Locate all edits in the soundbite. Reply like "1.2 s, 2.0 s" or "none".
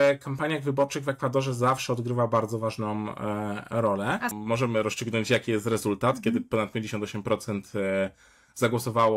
4.3 s